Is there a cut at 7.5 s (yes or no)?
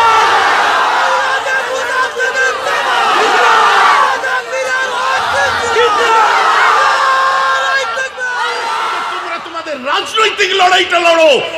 no